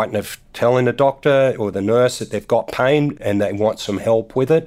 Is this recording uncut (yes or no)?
no